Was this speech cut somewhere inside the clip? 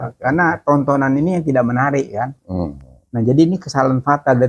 no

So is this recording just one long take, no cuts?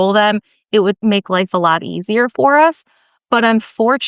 no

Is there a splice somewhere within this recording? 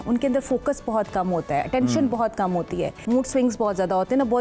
yes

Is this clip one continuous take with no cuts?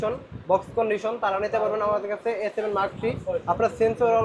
yes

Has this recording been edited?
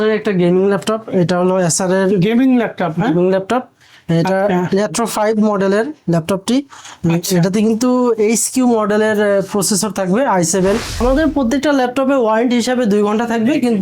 yes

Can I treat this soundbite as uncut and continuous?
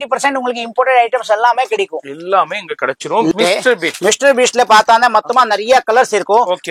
no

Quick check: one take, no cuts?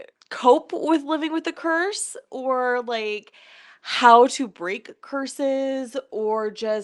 yes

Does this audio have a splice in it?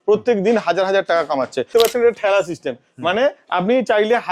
yes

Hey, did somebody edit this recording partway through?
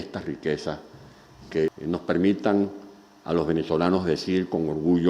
yes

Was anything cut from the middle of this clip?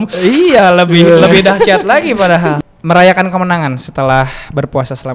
yes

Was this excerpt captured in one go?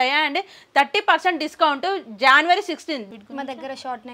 no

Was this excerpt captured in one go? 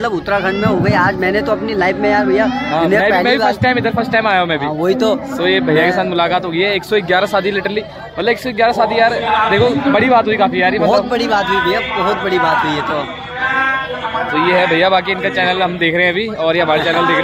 yes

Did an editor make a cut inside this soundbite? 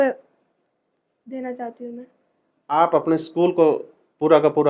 no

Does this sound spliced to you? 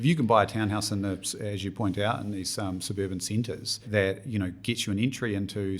yes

